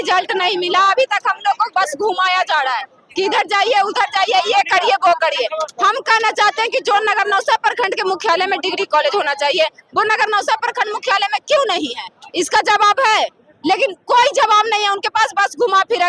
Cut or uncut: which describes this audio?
uncut